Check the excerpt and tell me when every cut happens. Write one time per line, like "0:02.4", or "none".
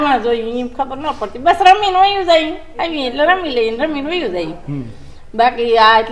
none